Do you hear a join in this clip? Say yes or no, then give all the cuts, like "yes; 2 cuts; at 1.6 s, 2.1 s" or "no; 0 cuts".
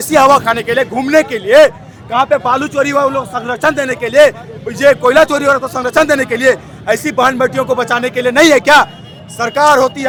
no; 0 cuts